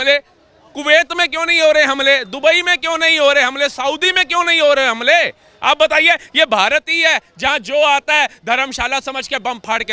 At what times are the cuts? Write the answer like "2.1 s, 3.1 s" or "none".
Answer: none